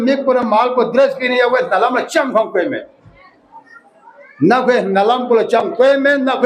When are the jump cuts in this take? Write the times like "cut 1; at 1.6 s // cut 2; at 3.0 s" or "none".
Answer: none